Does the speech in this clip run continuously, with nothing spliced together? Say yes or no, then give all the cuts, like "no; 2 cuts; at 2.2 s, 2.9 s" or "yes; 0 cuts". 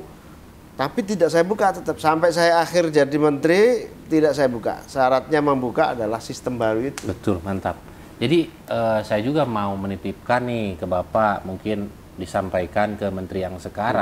yes; 0 cuts